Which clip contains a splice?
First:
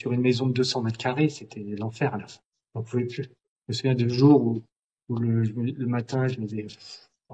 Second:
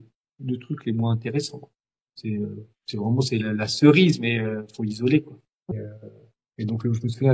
second; 1 cut; at 5.7 s

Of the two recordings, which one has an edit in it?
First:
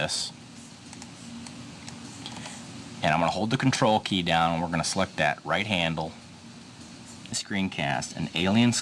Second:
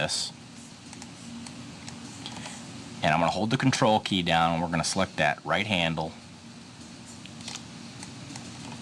second; 1 cut; at 7.2 s

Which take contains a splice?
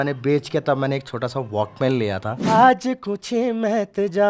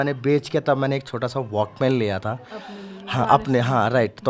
first; 1 cut; at 2.5 s

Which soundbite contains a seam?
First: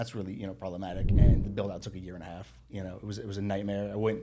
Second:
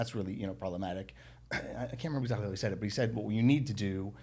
first; 1 cut; at 1.1 s

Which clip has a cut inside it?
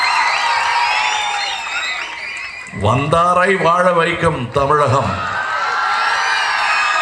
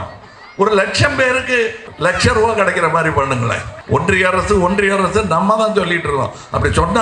second; 2 cuts; at 1.8 s, 3.7 s

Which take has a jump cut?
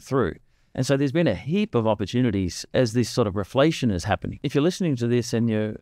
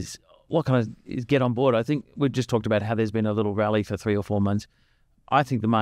first; 2 cuts; at 2.6 s, 4.4 s

